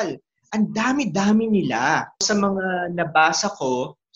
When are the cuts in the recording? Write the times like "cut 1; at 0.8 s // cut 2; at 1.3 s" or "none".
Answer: cut 1; at 2.2 s